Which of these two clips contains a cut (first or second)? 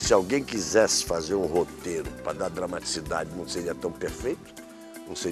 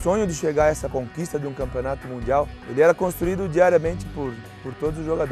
second